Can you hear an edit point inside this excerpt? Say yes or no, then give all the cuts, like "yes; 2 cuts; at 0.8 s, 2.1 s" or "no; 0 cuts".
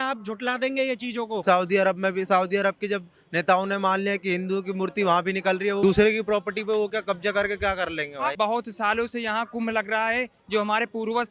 yes; 3 cuts; at 1.4 s, 5.8 s, 8.4 s